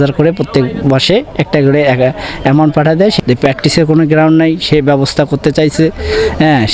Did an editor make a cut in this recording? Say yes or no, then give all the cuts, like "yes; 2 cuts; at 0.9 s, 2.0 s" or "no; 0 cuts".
yes; 1 cut; at 3.2 s